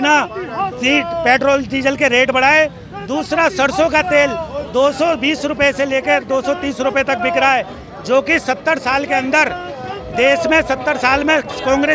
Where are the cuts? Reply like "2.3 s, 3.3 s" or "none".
none